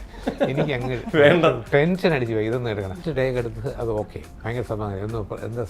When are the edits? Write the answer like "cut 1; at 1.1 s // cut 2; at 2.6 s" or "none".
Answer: cut 1; at 3.0 s // cut 2; at 4.3 s